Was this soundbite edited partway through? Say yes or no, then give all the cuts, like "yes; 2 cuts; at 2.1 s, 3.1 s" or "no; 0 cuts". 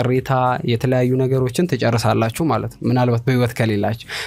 no; 0 cuts